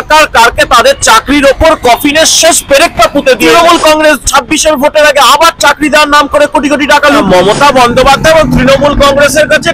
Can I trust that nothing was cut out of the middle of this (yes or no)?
no